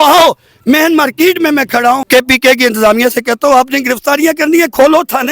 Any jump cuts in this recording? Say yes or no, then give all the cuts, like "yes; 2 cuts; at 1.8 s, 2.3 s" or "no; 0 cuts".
yes; 1 cut; at 2.0 s